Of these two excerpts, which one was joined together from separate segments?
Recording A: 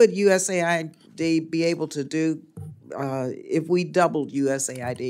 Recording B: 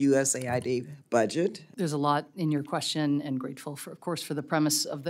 B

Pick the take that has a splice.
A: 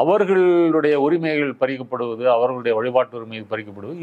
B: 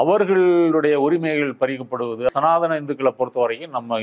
B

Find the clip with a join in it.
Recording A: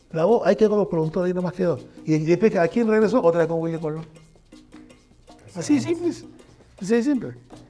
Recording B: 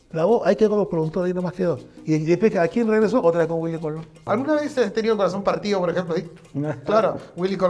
B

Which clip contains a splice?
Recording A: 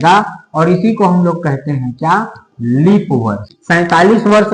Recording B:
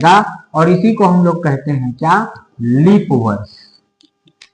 A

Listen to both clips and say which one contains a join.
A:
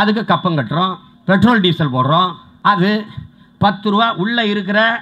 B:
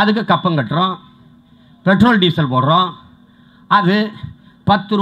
A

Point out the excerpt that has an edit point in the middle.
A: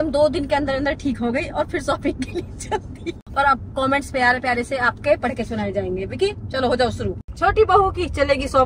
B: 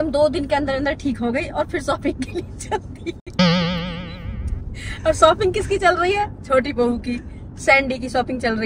A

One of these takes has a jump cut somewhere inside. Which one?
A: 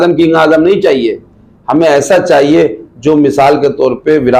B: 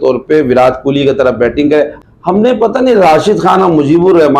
B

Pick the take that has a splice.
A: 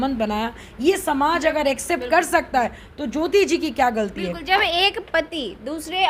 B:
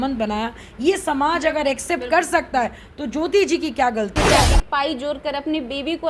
B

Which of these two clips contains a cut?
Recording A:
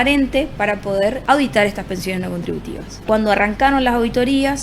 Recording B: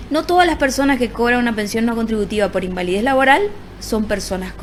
A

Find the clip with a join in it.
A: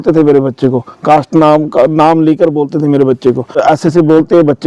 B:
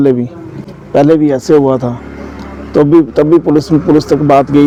A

